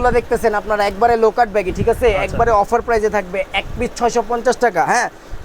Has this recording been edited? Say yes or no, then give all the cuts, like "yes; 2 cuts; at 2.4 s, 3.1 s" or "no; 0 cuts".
no; 0 cuts